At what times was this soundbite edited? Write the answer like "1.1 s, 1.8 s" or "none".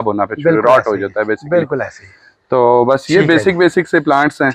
none